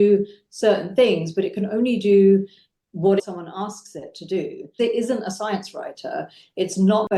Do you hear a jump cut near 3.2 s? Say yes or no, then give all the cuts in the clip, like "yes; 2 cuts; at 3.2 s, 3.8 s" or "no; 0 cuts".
yes; 2 cuts; at 3.2 s, 4.8 s